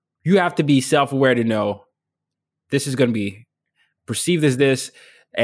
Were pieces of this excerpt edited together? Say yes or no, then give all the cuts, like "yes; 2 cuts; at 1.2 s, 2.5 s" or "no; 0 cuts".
yes; 1 cut; at 3.9 s